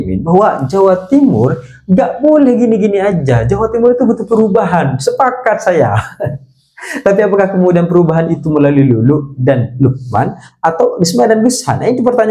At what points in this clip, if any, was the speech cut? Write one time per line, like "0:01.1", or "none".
none

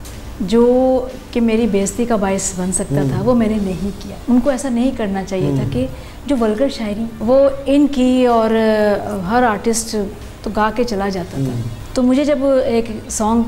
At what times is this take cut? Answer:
0:04.1
0:07.1
0:11.7

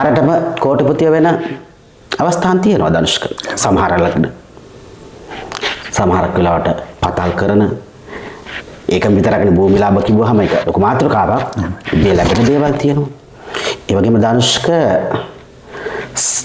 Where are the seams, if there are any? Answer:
none

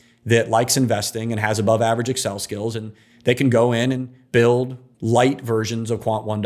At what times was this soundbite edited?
0:04.1
0:04.9

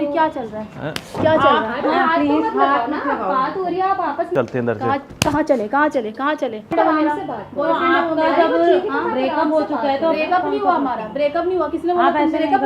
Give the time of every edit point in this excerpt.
0:04.3
0:06.7

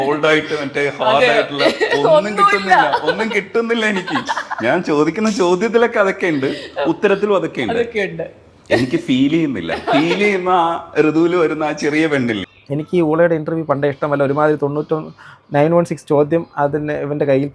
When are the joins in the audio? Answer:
0:12.4

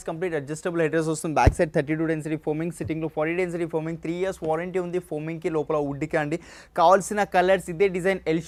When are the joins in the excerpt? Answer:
none

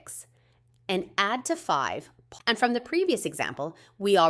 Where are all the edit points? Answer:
none

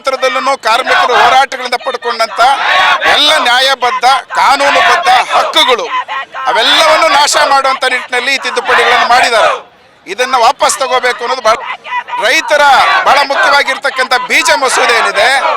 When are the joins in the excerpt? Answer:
0:11.5

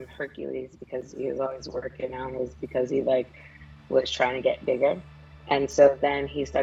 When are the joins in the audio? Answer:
none

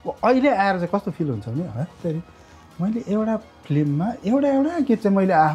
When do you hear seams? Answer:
none

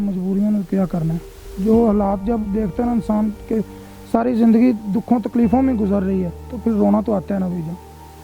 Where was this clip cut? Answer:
none

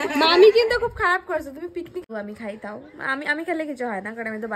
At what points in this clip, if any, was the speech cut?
0:02.0

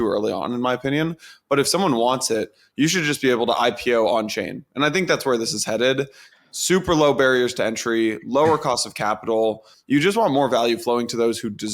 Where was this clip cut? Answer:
0:09.7

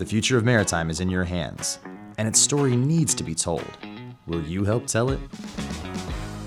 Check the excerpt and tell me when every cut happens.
none

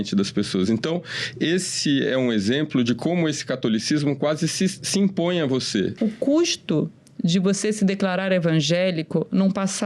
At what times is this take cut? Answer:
0:05.9

